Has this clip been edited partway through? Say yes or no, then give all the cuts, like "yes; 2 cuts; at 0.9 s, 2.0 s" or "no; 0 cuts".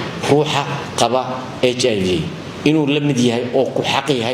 no; 0 cuts